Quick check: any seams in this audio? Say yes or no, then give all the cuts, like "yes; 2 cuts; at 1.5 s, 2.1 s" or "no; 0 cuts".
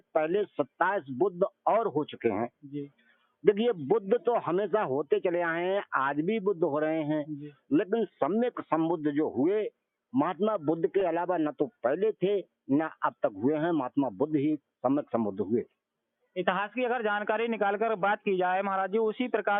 no; 0 cuts